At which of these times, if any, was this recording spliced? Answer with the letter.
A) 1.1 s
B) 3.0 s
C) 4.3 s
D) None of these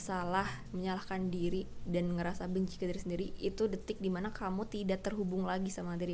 D